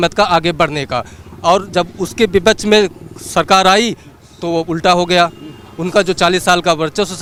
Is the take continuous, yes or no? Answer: yes